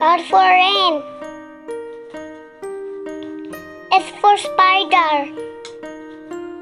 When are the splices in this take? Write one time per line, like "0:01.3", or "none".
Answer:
0:01.2
0:03.6
0:05.3